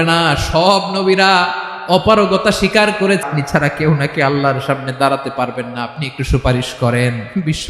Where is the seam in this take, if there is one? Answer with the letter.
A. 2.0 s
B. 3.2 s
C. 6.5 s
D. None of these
B